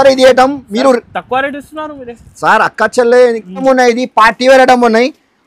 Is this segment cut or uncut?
cut